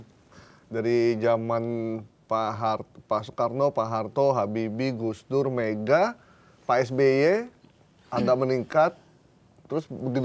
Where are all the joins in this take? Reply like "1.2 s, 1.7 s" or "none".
none